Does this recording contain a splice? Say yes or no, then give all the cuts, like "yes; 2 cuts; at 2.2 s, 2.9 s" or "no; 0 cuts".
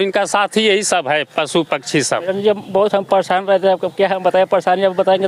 yes; 1 cut; at 2.3 s